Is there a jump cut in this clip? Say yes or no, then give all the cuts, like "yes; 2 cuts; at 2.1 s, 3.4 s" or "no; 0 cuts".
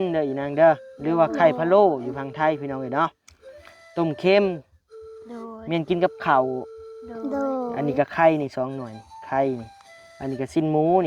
no; 0 cuts